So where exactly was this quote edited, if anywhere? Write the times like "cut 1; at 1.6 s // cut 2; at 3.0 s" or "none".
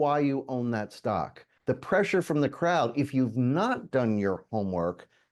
cut 1; at 1.4 s